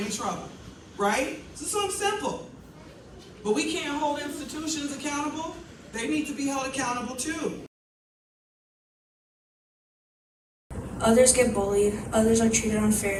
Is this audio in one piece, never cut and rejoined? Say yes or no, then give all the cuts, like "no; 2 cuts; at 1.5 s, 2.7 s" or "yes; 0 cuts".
yes; 0 cuts